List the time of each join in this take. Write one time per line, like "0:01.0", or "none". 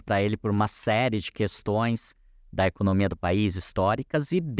none

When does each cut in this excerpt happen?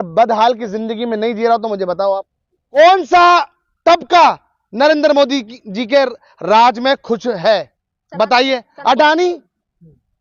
0:02.8

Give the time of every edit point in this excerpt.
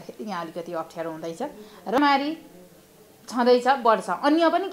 0:02.0

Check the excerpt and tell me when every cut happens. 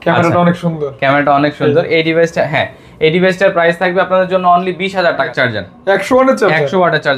0:05.3

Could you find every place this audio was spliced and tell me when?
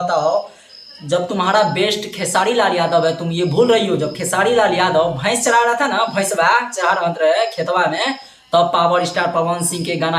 none

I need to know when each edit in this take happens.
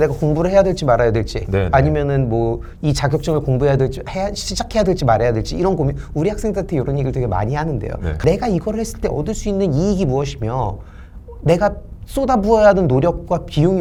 none

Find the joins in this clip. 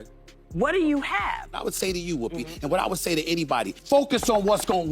0:01.6
0:03.8

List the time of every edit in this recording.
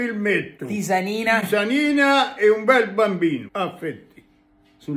0:03.5

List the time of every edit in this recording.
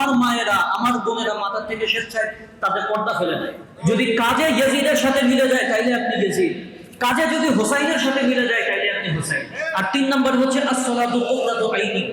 0:03.7
0:09.6

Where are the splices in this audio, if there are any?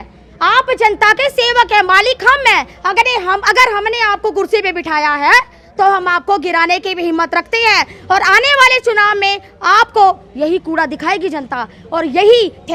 none

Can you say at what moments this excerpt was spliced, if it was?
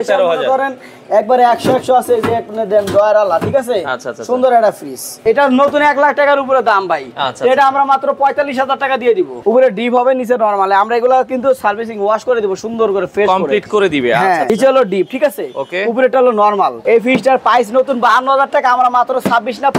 0:05.1
0:09.3
0:14.5
0:16.8

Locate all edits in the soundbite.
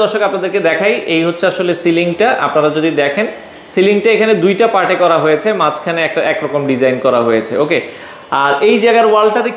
none

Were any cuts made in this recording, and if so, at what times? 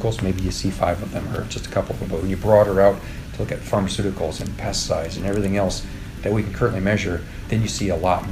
0:07.4

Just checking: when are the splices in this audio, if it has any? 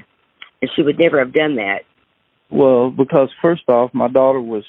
0:01.8

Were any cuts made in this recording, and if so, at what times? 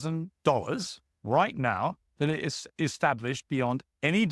0:01.1

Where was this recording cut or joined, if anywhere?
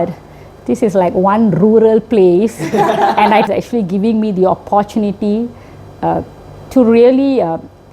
0:03.5

